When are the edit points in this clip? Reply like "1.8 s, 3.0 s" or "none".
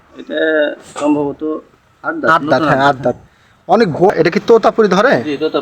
4.1 s